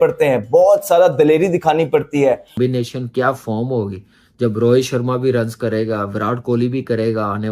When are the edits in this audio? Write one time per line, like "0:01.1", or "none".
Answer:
0:02.6